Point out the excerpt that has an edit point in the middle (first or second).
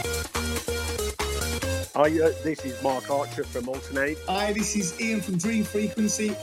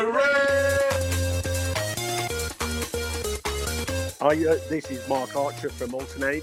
second